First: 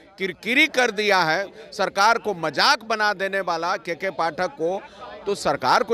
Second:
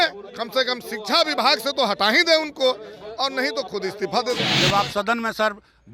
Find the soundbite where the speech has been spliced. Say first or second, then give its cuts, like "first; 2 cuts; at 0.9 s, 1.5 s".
second; 1 cut; at 4.5 s